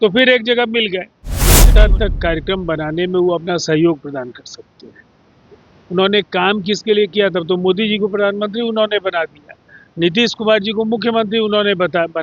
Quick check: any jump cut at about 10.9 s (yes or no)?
no